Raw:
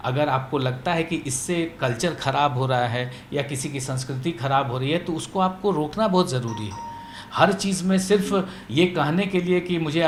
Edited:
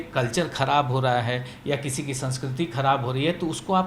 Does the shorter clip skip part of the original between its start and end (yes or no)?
no